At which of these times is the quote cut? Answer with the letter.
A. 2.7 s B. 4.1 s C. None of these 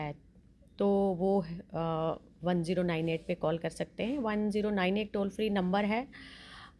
C